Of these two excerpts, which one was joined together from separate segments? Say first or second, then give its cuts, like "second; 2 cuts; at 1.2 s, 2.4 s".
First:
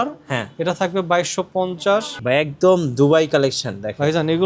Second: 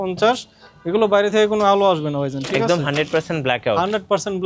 first; 1 cut; at 2.1 s